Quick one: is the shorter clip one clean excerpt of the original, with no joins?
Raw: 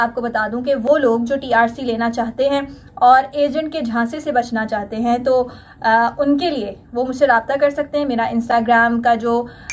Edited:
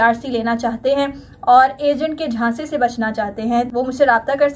no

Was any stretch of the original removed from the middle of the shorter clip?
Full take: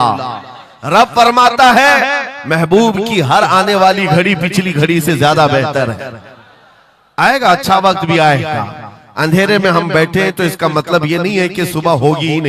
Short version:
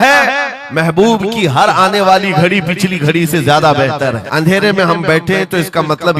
yes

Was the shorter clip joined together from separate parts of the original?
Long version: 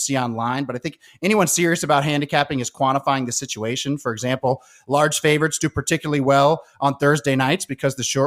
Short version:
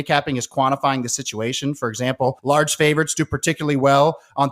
yes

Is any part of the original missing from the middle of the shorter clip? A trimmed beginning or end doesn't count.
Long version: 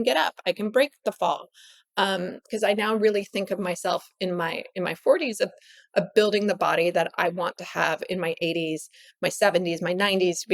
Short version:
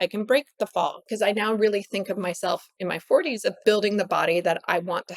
yes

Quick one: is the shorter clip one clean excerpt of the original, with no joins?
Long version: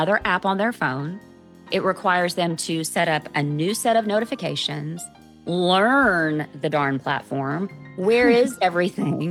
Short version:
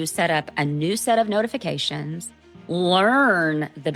yes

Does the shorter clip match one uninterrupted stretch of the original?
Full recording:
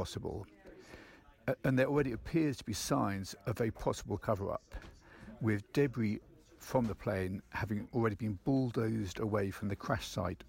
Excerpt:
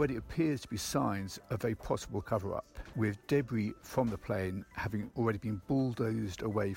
no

